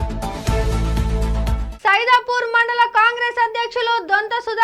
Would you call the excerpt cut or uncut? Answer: cut